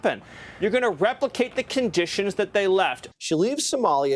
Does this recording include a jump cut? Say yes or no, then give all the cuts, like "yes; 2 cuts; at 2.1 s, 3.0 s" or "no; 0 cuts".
yes; 1 cut; at 3.0 s